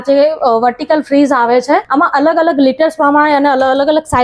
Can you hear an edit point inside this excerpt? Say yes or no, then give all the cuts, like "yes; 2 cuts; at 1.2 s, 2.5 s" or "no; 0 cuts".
yes; 1 cut; at 1.9 s